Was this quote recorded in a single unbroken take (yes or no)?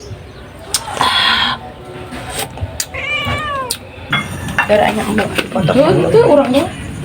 no